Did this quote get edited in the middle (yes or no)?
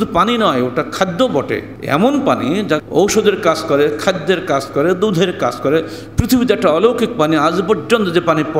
yes